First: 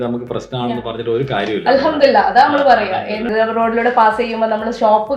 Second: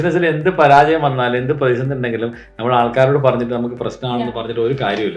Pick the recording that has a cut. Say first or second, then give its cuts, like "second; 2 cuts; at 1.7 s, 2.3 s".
first; 1 cut; at 3.3 s